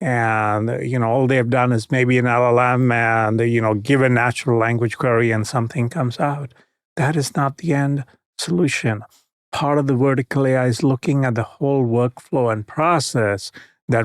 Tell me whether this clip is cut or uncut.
uncut